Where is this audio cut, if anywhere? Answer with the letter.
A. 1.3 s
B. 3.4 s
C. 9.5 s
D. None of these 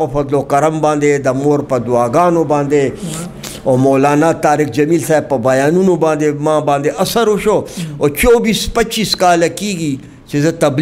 D